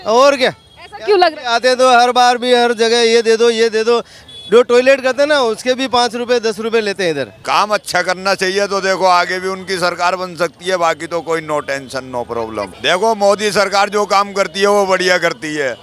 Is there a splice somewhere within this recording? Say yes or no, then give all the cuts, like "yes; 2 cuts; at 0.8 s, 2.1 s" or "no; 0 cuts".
yes; 2 cuts; at 7.4 s, 12.7 s